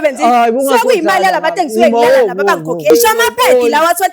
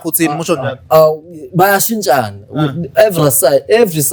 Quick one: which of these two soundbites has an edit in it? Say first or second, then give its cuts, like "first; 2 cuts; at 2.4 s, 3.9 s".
first; 1 cut; at 2.9 s